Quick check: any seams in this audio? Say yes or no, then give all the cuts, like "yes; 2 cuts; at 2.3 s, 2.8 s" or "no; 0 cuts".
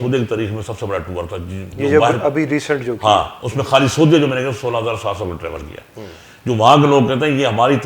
no; 0 cuts